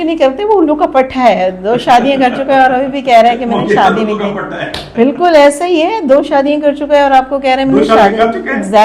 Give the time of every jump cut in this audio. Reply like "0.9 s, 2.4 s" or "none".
none